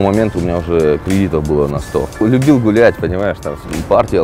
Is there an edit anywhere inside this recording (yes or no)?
yes